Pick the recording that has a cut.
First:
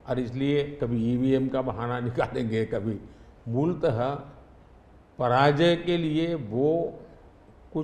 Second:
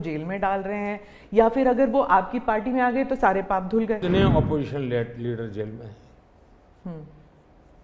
second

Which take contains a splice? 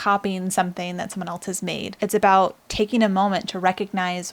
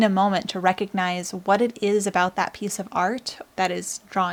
first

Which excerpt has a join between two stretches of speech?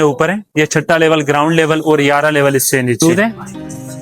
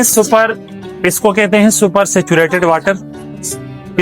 first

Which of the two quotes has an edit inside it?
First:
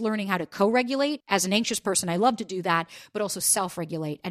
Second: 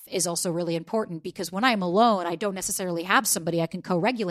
first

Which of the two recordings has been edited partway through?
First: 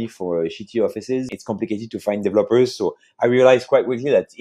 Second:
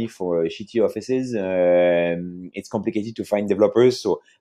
first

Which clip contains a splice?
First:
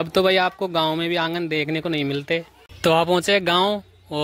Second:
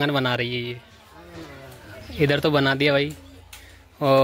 first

